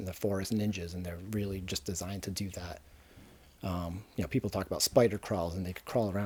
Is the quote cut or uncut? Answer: uncut